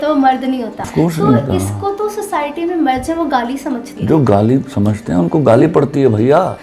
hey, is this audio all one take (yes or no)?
no